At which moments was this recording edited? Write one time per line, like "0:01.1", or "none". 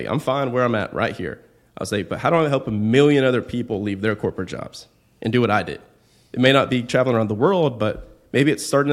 none

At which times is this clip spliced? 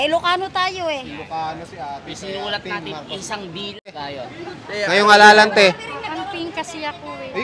0:04.0

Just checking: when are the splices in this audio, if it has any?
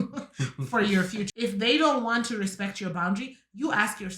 0:01.3

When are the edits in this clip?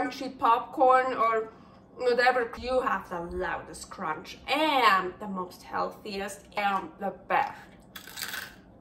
0:02.5
0:06.4

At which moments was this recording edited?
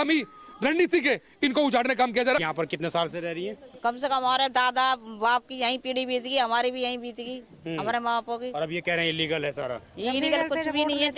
0:02.4

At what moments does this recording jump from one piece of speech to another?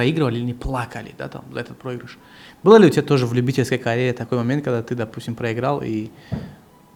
none

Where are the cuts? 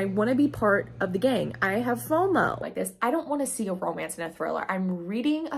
0:02.6

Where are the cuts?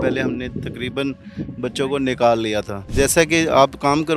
0:02.9

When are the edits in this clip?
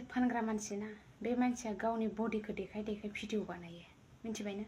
none

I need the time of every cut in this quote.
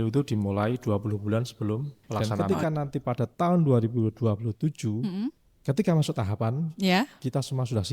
0:02.3

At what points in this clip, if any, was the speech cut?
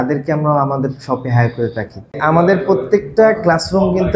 0:02.2

